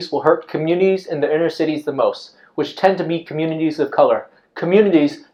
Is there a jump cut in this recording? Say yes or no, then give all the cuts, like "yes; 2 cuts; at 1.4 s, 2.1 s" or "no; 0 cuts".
no; 0 cuts